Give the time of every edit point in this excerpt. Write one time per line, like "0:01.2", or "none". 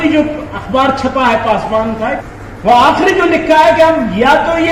none